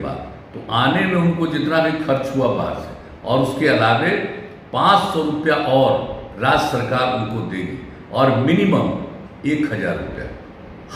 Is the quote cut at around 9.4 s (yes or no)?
no